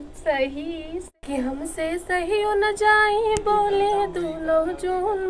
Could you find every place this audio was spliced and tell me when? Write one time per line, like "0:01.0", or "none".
0:01.0